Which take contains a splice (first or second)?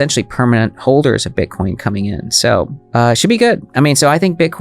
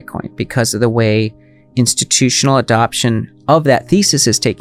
first